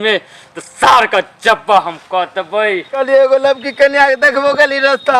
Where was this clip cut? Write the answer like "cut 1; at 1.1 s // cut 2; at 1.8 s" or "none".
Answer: cut 1; at 2.9 s